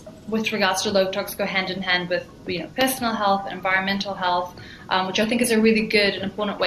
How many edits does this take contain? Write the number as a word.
zero